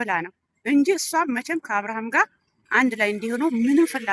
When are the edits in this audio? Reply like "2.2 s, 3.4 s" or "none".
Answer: none